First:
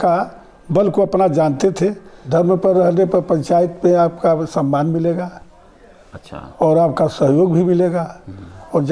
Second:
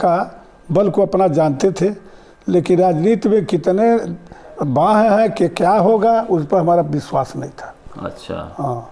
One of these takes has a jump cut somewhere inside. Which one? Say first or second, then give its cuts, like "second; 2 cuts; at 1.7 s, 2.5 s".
first; 1 cut; at 2.1 s